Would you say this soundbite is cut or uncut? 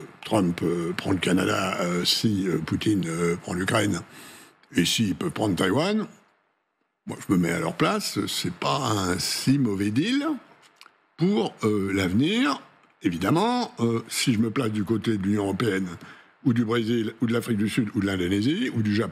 uncut